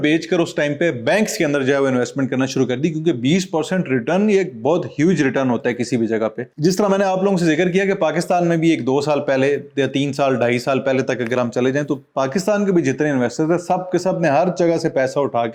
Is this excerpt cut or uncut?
uncut